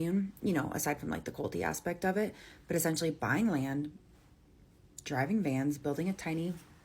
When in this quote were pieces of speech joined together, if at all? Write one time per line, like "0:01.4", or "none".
none